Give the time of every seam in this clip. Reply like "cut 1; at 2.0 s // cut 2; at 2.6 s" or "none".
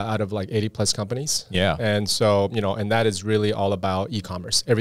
none